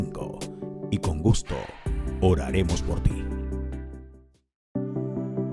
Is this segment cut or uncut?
cut